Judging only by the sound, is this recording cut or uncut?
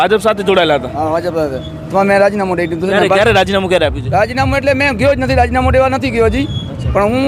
uncut